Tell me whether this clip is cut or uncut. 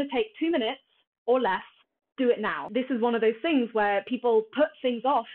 cut